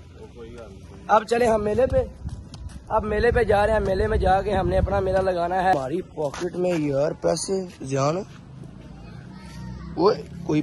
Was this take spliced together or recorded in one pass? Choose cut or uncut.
cut